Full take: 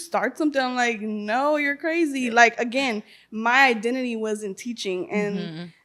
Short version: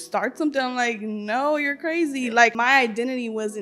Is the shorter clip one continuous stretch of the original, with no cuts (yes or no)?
no